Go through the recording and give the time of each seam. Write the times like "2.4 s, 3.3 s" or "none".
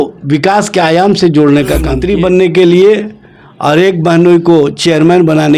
2.0 s

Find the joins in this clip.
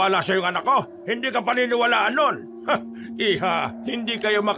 1.0 s, 2.5 s, 3.8 s

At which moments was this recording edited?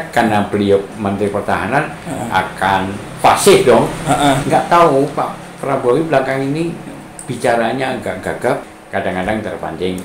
4.4 s, 8.6 s

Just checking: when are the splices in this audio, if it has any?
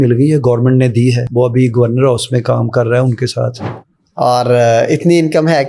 1.2 s, 3.6 s

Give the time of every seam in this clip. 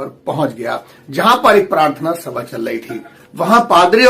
0.9 s

